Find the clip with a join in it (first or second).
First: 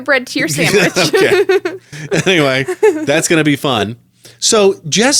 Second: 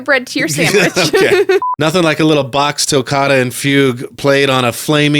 second